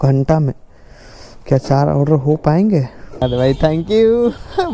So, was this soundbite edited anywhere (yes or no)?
yes